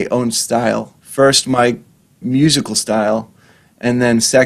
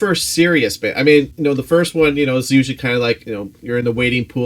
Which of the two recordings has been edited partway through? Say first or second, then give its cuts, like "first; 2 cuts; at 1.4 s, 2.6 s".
second; 2 cuts; at 1.3 s, 3.3 s